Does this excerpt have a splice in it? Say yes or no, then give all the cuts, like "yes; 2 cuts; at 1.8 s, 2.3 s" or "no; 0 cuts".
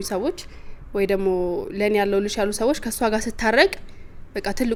no; 0 cuts